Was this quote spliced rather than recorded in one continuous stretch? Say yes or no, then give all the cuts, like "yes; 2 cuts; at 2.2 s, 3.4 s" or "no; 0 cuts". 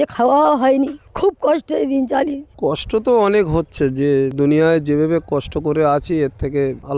yes; 2 cuts; at 2.8 s, 4.3 s